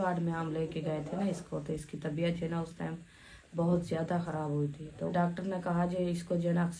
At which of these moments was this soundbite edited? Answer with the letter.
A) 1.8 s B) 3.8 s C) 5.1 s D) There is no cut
C